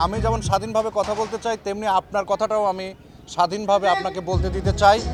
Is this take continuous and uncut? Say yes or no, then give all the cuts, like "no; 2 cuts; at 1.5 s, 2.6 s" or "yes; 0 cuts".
yes; 0 cuts